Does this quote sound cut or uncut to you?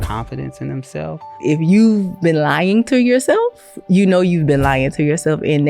cut